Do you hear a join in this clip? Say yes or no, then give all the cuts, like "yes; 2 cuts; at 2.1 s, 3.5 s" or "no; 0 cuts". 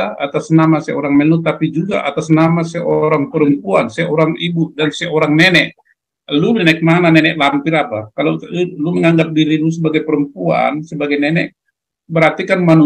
no; 0 cuts